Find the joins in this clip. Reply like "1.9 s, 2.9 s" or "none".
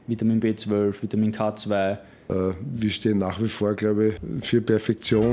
2.1 s, 4.3 s